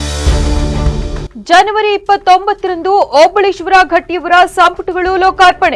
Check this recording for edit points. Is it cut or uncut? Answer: cut